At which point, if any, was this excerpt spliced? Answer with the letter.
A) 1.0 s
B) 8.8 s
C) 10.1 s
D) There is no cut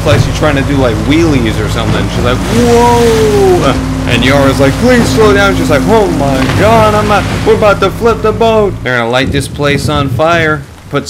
B